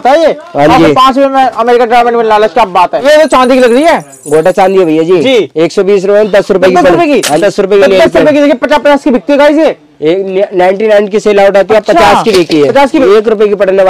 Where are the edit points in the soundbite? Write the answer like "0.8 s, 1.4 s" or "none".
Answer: 3.0 s, 7.4 s, 13.0 s